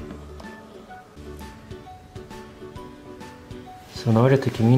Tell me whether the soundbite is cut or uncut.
cut